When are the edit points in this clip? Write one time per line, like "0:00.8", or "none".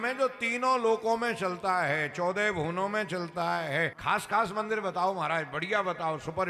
0:04.0